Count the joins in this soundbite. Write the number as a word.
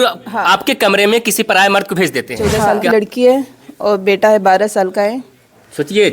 one